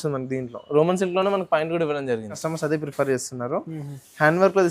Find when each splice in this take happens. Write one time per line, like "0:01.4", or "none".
0:02.4